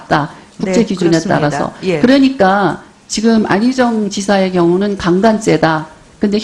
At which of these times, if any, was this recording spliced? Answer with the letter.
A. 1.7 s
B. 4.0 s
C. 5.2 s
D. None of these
A